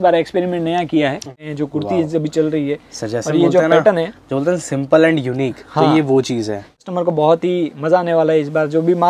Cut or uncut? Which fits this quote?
cut